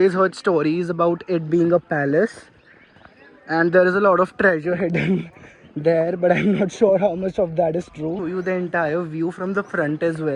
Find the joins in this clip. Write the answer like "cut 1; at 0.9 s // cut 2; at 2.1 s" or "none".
cut 1; at 8.2 s